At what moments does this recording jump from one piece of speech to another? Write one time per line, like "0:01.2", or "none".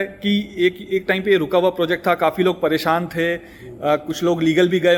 none

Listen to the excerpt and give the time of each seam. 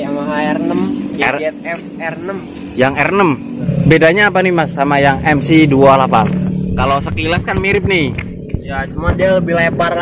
0:03.6

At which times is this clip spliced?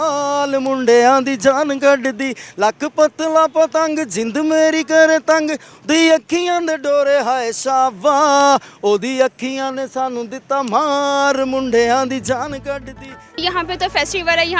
0:13.4

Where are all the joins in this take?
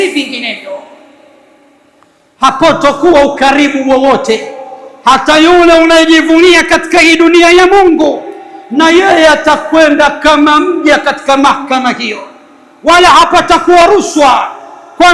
none

